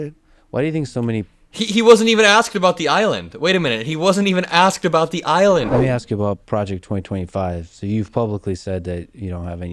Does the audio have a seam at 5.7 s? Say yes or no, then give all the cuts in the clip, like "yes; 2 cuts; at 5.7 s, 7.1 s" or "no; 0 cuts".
yes; 1 cut; at 5.7 s